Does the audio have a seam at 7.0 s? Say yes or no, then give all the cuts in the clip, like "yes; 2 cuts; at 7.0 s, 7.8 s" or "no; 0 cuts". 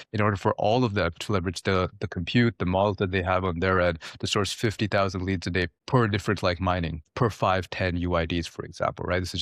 yes; 2 cuts; at 5.8 s, 7.0 s